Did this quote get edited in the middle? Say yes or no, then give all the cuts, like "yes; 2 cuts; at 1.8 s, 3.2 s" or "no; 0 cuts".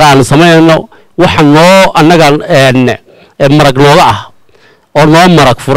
no; 0 cuts